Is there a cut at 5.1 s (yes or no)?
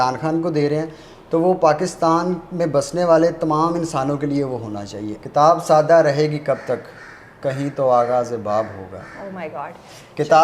yes